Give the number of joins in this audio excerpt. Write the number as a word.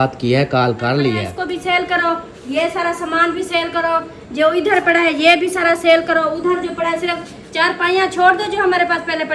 one